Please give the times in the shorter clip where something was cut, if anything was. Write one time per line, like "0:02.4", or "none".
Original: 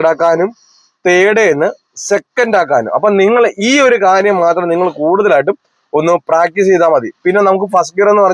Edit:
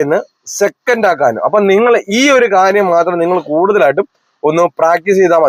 none